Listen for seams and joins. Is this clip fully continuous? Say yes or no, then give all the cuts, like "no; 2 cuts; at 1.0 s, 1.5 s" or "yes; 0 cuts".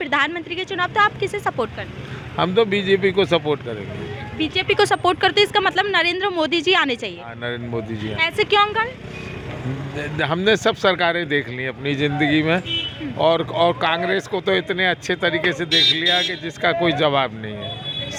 yes; 0 cuts